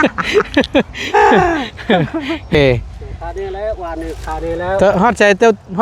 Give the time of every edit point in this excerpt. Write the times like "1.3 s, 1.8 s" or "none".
2.5 s